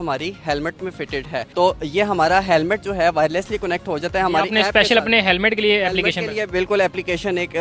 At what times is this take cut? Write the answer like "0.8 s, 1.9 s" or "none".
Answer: none